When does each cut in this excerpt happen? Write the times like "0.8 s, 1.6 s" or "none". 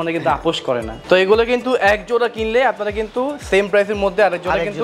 0.9 s